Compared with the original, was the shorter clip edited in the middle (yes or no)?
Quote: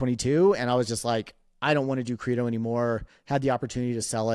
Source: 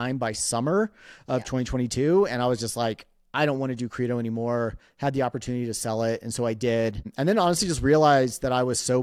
no